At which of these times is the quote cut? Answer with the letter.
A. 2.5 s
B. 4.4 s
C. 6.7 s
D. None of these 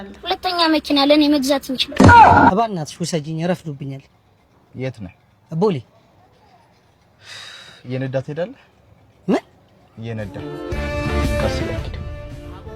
A